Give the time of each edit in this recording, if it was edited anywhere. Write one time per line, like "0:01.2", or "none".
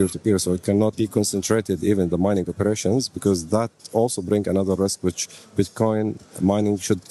0:00.9